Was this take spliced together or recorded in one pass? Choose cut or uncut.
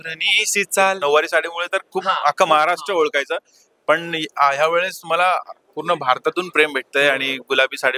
cut